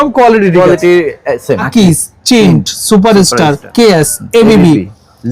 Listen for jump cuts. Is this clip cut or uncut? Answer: cut